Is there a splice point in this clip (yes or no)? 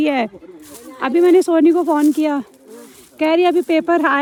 no